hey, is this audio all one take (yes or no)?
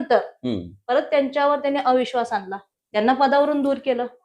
no